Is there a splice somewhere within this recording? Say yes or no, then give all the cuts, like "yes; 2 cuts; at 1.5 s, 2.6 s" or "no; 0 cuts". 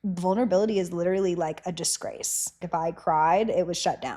yes; 1 cut; at 2.6 s